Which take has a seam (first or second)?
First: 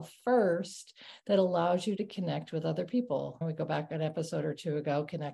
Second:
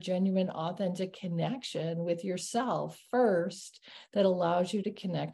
first